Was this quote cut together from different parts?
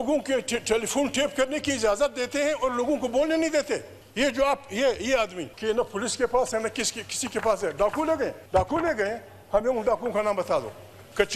yes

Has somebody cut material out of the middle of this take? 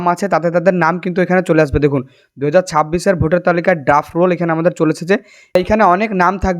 yes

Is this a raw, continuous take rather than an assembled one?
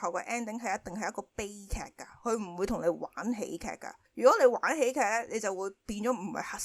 yes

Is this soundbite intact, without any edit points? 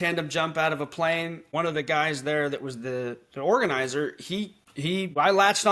no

